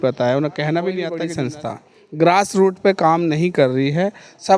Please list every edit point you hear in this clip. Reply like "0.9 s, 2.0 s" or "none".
1.2 s